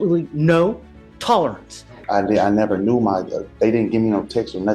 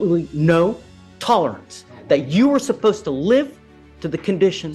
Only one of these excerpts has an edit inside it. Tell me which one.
first; 1 cut; at 2.0 s

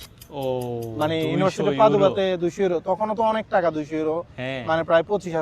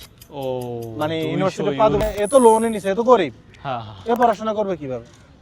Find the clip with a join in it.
second; 1 cut; at 2.0 s

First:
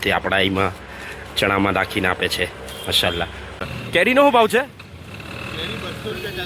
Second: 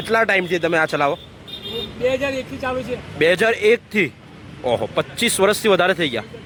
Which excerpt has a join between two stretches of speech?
first; 1 cut; at 3.7 s

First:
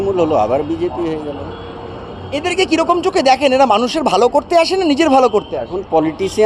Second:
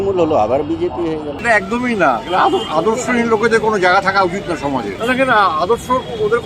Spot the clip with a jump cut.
second; 2 cuts; at 1.3 s, 4.9 s

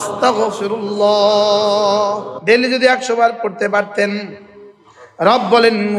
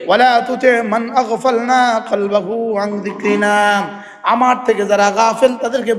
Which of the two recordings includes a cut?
first; 1 cut; at 2.3 s

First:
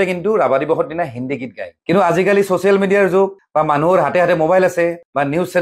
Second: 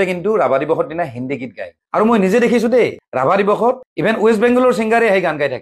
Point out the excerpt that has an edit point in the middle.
second; 1 cut; at 1.8 s

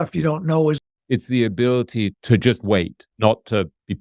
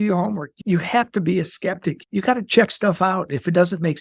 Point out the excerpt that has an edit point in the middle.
first; 2 cuts; at 0.8 s, 3.1 s

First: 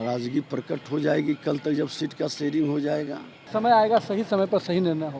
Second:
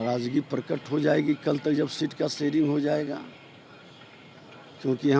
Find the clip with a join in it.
first; 1 cut; at 3.4 s

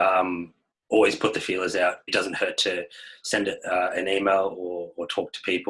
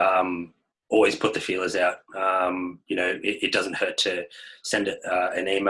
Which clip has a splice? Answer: first; 1 cut; at 2.1 s

